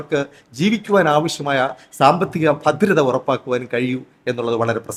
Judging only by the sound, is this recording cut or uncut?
uncut